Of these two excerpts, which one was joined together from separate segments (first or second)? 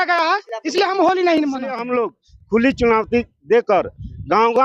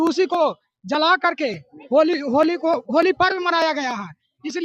first